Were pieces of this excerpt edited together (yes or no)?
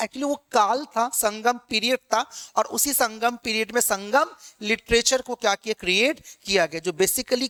no